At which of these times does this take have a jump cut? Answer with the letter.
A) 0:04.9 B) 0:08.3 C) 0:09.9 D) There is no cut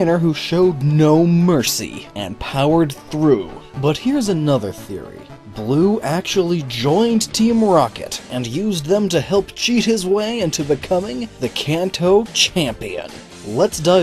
A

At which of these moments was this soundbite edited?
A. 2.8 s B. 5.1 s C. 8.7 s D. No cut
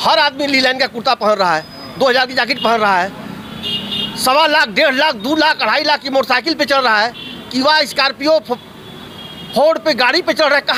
D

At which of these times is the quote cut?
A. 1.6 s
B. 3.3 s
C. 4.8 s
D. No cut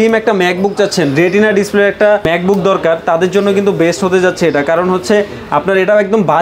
D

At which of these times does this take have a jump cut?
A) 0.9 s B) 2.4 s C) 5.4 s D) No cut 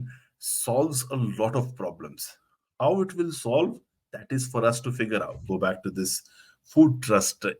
C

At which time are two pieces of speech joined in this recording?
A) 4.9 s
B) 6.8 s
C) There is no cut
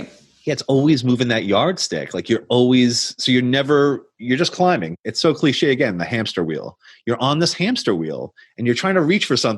A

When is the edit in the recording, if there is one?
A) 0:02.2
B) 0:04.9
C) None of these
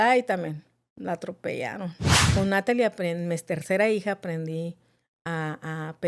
A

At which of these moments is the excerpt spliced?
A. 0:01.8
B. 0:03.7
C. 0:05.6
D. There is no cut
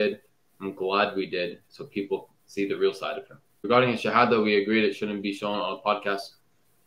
B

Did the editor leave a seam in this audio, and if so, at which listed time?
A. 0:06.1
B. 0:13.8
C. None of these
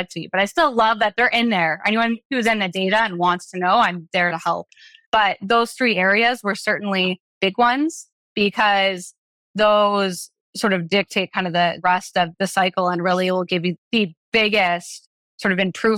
B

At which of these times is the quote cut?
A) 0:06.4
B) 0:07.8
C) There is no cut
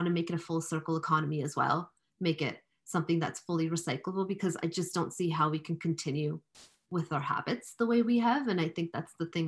C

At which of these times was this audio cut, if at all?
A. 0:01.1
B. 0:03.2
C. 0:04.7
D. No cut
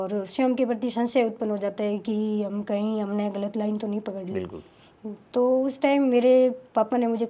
D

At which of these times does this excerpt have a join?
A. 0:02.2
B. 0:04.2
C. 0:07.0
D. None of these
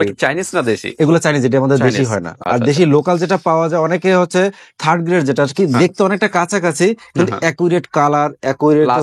D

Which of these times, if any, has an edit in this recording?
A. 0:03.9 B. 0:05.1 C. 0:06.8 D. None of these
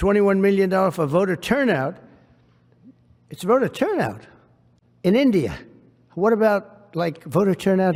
D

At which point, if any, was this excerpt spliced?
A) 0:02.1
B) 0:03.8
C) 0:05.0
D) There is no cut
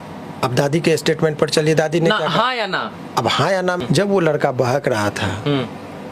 B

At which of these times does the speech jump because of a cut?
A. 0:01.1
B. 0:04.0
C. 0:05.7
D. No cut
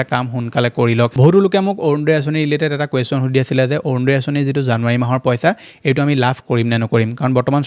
A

